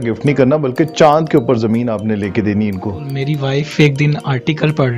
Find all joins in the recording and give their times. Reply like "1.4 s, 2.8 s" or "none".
3.1 s